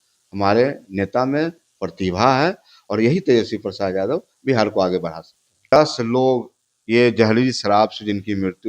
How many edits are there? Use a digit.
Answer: 1